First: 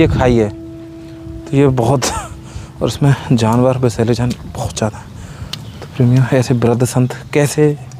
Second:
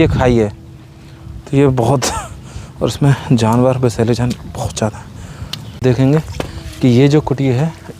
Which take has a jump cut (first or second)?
second